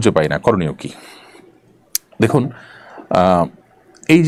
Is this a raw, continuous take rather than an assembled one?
yes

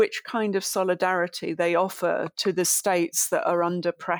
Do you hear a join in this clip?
no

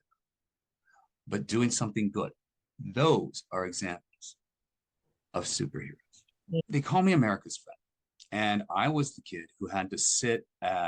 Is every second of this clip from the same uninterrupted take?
no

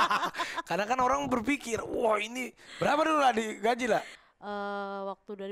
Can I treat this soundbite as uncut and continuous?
no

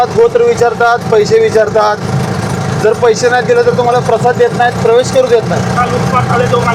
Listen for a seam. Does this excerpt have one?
yes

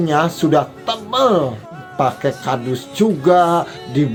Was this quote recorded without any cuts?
yes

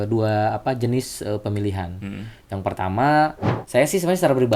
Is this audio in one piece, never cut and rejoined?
no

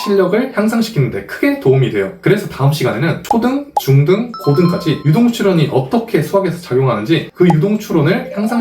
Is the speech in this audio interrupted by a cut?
no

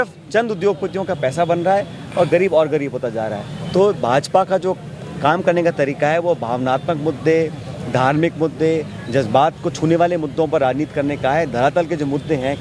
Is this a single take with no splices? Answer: yes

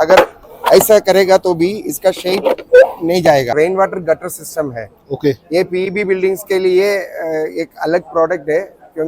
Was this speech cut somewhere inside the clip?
yes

